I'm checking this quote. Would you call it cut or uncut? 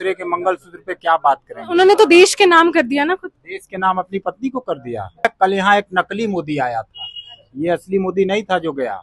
cut